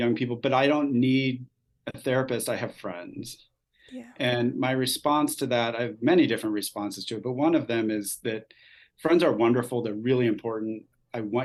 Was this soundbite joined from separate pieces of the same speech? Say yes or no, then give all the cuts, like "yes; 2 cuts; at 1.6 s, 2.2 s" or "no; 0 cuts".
no; 0 cuts